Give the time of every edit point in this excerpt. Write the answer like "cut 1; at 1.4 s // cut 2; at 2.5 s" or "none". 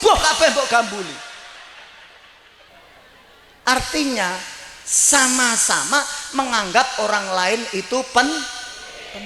cut 1; at 2.7 s

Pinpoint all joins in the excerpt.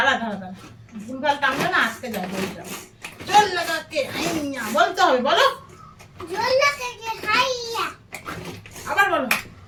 none

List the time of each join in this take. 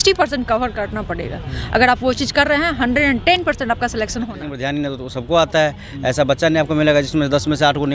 cut 1; at 4.4 s

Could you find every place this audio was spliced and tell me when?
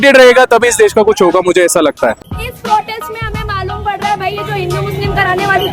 cut 1; at 2.2 s

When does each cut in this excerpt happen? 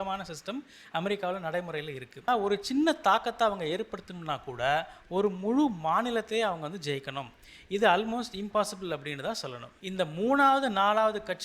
cut 1; at 2.3 s // cut 2; at 9.7 s

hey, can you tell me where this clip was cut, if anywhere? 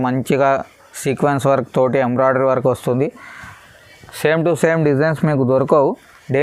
none

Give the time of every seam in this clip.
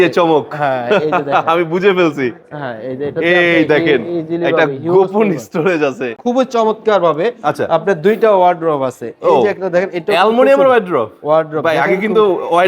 cut 1; at 6.1 s

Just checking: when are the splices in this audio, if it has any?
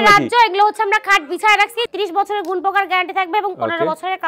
cut 1; at 1.9 s

